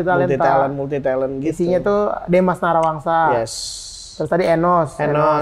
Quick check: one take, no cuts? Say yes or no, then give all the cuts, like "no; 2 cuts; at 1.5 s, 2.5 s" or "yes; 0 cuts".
yes; 0 cuts